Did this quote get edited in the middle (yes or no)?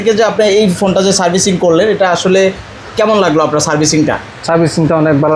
no